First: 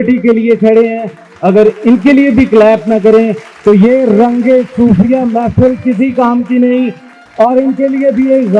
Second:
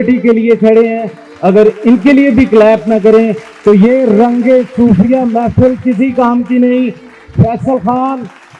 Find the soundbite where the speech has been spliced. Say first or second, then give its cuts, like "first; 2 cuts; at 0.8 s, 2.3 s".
first; 1 cut; at 7.2 s